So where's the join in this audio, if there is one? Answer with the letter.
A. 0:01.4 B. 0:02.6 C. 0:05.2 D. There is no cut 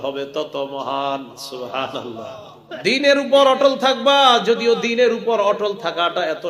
B